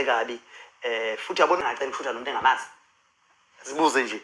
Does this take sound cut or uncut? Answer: cut